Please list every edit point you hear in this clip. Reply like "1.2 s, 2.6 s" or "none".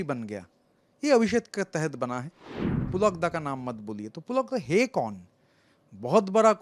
2.8 s